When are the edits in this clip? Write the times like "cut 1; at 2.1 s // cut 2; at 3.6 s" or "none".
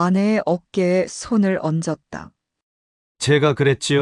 cut 1; at 3.0 s